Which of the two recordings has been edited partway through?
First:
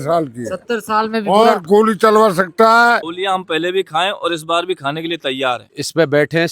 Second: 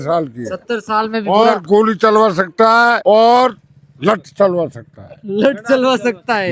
first; 2 cuts; at 3.0 s, 5.7 s

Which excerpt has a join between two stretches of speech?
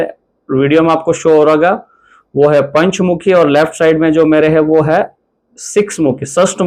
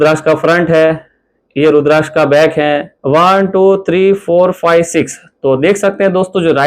second; 1 cut; at 2.9 s

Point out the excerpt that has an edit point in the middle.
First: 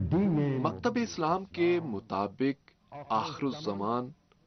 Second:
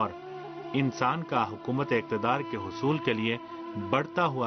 second; 1 cut; at 1.1 s

